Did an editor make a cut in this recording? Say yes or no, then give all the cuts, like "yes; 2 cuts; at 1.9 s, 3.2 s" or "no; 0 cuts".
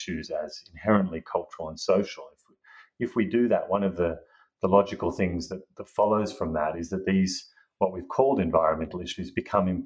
no; 0 cuts